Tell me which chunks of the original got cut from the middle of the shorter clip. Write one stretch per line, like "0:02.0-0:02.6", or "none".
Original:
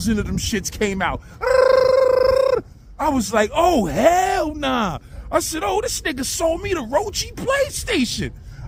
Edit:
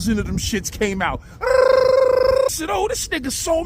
0:02.5-0:05.4